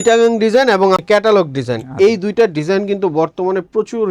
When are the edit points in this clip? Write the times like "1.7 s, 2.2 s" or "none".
1.0 s